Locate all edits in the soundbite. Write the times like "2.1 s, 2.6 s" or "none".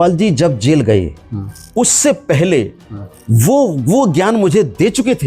none